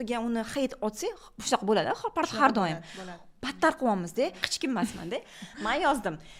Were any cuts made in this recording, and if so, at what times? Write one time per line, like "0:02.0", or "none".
0:04.5